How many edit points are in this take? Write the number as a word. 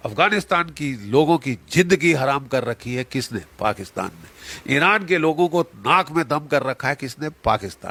zero